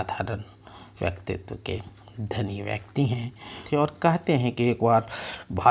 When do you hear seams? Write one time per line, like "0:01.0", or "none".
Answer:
0:03.6